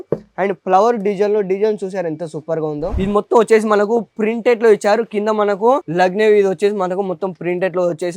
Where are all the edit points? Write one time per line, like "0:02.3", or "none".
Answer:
0:02.9